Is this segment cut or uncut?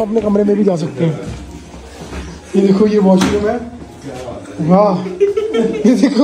uncut